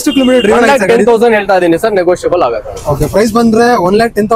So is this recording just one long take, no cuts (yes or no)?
yes